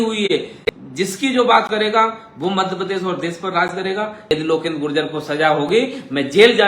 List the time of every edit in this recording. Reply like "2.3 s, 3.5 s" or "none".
4.3 s